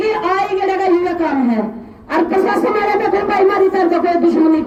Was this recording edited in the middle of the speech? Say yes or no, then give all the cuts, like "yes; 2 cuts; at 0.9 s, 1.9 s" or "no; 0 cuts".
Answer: no; 0 cuts